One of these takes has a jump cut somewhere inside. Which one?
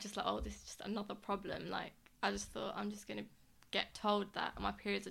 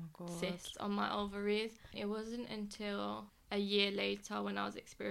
second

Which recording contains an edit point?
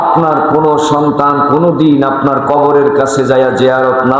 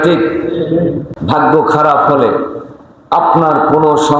second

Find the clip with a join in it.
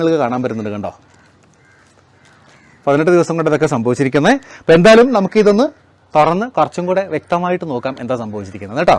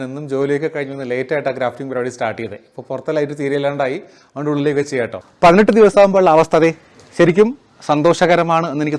second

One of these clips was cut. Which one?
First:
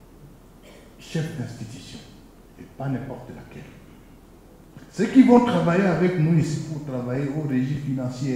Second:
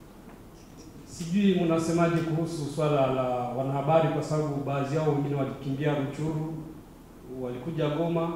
first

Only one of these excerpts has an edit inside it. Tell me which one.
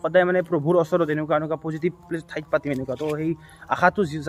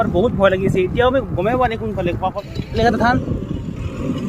second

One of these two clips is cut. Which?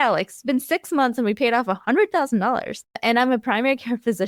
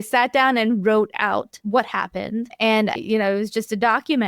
second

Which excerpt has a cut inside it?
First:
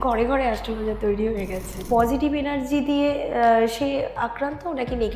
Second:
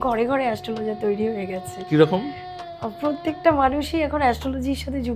first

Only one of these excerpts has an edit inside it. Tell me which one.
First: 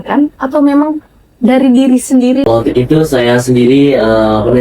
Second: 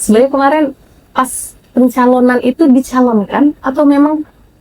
first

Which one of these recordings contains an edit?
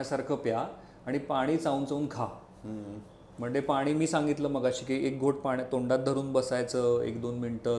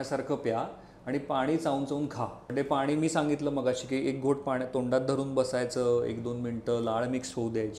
second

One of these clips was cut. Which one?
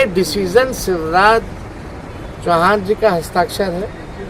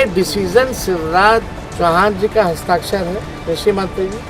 second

